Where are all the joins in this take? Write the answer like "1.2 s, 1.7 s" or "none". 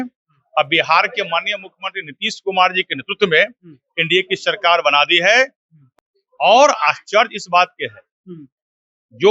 5.8 s